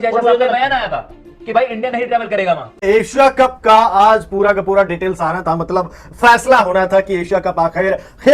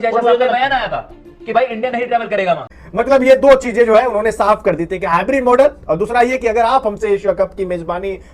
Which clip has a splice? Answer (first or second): second